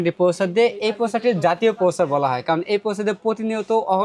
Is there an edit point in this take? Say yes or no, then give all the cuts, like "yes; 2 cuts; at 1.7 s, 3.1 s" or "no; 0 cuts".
no; 0 cuts